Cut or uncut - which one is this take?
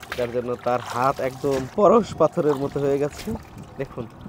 cut